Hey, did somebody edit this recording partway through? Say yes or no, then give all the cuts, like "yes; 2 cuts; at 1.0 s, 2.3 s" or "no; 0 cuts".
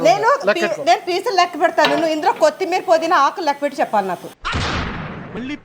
no; 0 cuts